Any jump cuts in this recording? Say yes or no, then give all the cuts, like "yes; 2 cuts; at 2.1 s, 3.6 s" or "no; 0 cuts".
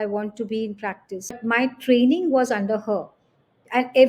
yes; 1 cut; at 1.3 s